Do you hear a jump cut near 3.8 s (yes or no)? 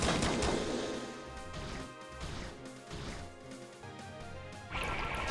yes